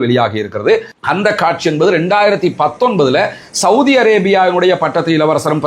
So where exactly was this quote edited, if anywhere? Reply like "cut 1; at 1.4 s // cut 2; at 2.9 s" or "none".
cut 1; at 0.9 s